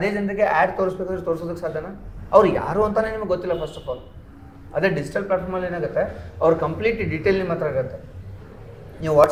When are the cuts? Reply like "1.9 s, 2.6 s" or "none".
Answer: none